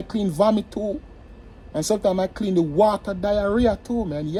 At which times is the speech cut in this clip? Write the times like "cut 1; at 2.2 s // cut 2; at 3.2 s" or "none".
none